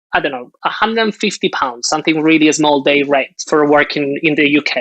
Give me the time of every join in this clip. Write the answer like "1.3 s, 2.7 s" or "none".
3.4 s